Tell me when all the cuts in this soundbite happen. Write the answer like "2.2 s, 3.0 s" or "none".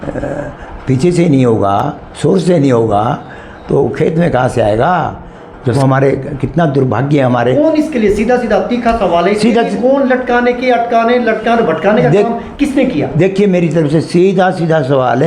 5.7 s